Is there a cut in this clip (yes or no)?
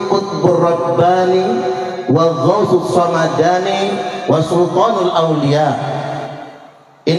no